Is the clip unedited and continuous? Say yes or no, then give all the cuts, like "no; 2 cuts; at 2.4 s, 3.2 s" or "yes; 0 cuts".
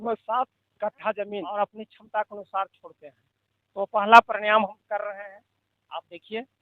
no; 1 cut; at 1.4 s